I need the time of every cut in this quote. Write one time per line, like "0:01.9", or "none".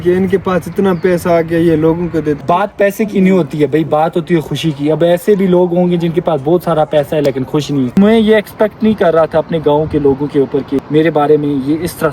0:02.4
0:07.9
0:10.8